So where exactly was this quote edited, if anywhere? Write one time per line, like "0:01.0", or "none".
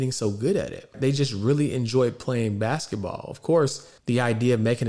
0:00.9
0:03.9